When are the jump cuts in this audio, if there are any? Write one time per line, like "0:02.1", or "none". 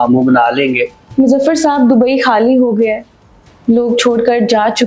0:01.1